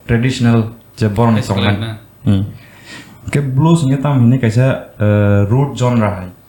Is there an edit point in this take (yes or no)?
no